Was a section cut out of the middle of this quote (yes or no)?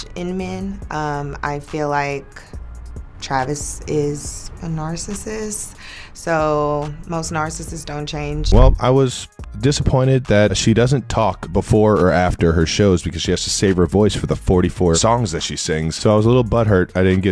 yes